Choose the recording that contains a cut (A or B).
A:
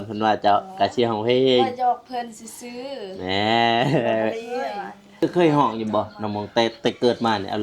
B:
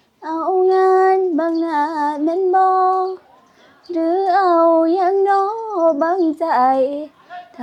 A